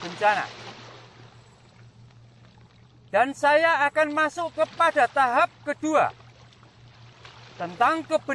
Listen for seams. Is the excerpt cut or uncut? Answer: cut